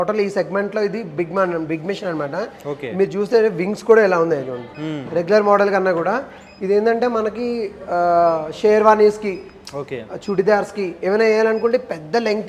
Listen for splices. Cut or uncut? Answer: uncut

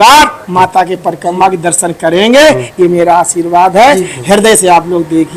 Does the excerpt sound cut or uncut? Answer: uncut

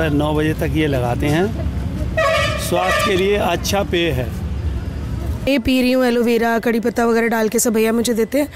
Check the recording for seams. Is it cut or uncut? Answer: cut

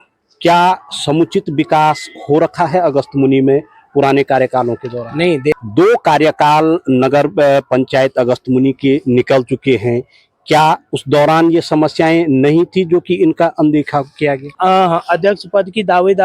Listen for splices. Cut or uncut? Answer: cut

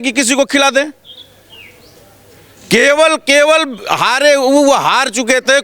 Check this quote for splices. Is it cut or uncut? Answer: uncut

